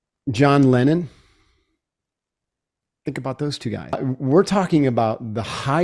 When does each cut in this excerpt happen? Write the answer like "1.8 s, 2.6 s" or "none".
3.9 s